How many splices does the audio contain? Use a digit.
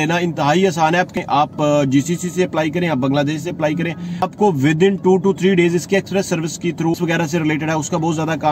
3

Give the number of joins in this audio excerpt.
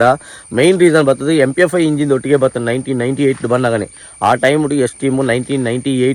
0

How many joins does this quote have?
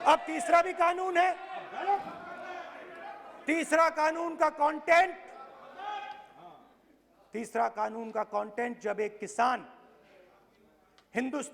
0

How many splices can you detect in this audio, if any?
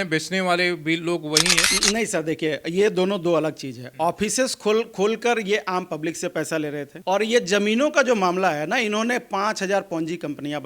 2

